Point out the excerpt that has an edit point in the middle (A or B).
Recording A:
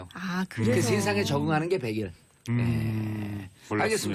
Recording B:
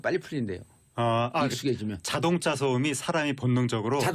B